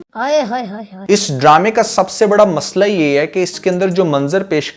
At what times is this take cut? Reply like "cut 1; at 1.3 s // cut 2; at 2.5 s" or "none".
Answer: none